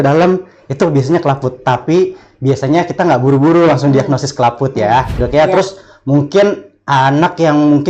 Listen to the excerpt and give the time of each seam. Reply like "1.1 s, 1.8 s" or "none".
5.2 s